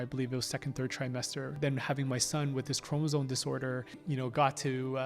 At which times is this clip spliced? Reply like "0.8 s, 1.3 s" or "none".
1.5 s, 4.0 s